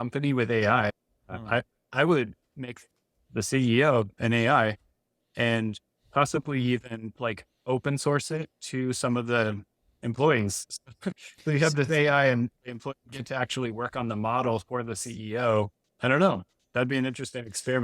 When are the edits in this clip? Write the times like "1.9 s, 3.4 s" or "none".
15.8 s

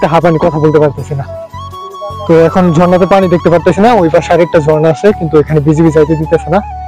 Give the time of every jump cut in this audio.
none

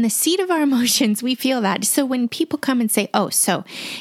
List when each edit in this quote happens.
none

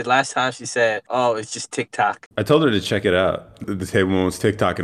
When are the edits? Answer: 1.0 s, 2.2 s, 3.6 s

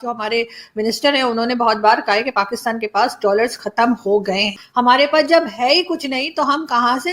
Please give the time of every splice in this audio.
4.6 s

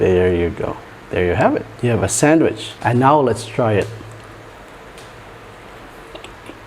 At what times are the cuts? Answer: 1.7 s

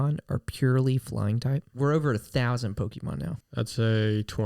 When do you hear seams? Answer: 1.7 s, 3.4 s

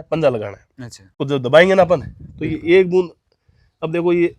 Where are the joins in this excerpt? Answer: 1.2 s

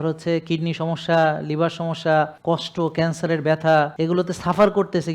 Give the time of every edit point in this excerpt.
2.4 s, 3.9 s

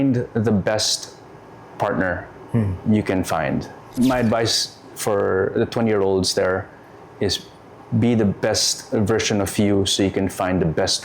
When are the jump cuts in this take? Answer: 3.9 s

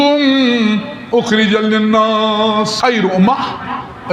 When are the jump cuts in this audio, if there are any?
2.7 s

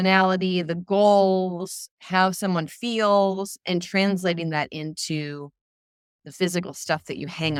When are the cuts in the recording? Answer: none

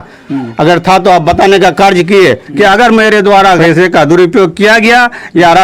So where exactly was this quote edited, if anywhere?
2.4 s, 3.6 s

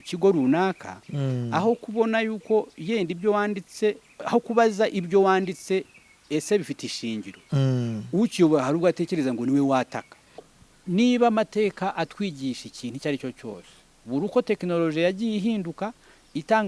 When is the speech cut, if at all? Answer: 10.6 s

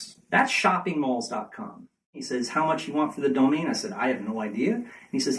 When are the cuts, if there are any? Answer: 2.2 s

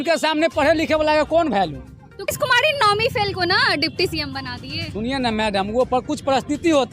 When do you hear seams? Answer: 2.3 s

